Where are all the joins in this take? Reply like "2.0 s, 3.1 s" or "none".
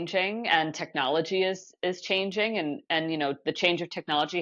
none